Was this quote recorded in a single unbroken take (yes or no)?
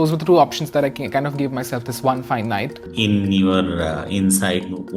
no